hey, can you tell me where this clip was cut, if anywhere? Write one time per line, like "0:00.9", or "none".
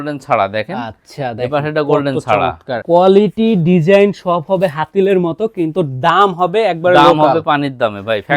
0:02.7